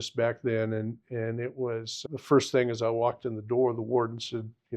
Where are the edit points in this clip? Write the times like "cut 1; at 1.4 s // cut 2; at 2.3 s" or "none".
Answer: cut 1; at 2.0 s